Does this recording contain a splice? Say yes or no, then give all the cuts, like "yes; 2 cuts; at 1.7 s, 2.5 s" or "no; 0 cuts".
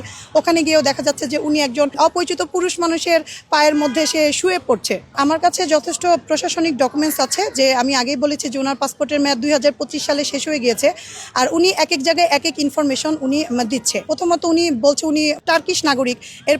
yes; 3 cuts; at 2.0 s, 5.1 s, 14.1 s